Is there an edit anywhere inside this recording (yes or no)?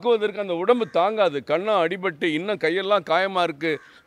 no